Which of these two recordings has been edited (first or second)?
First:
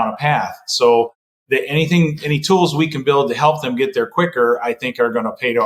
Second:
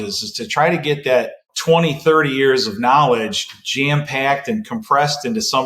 second